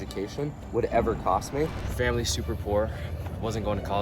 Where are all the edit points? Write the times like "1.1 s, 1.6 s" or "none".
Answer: 1.8 s